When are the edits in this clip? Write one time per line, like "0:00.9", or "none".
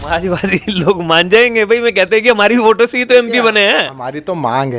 none